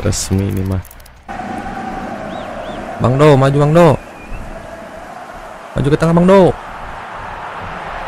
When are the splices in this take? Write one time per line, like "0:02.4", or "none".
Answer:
0:01.3